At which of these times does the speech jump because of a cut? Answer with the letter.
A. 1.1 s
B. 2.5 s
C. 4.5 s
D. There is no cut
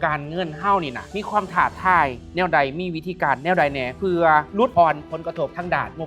A